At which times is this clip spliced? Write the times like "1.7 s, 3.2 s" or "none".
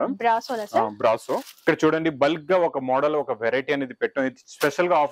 1.5 s